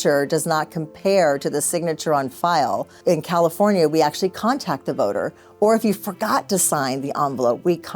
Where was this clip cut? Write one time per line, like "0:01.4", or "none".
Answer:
0:02.9